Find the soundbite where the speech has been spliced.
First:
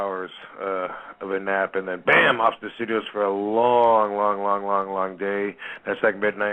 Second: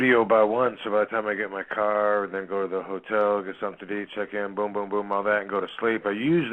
second; 1 cut; at 5.2 s

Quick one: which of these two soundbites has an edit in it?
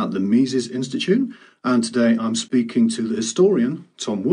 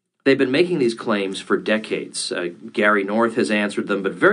first; 1 cut; at 1.9 s

